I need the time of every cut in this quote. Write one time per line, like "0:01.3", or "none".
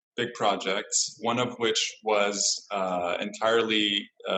none

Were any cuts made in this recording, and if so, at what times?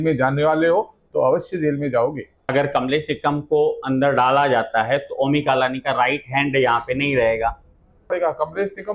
0:02.5
0:08.1

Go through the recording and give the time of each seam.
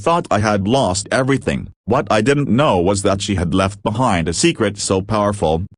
0:01.9

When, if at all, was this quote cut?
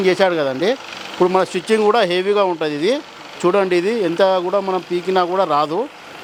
none

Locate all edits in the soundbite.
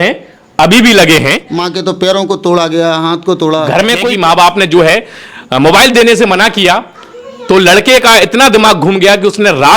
0:01.5
0:04.0

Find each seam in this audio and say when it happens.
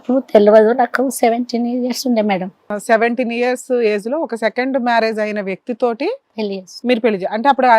0:02.8

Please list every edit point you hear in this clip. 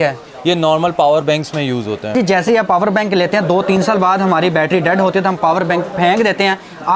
0:02.1

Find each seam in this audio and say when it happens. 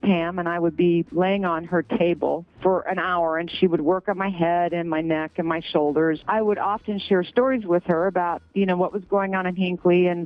0:02.5

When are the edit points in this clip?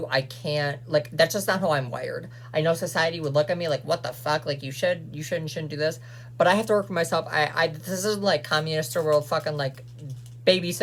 none

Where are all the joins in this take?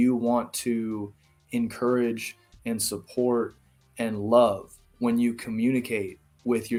none

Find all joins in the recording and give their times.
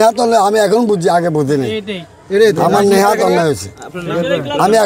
none

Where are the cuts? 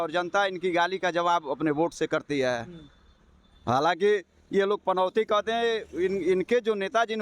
none

